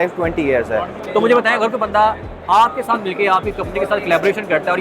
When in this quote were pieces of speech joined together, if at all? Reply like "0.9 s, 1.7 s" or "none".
1.0 s